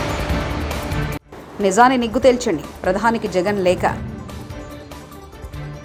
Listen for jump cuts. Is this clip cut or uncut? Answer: uncut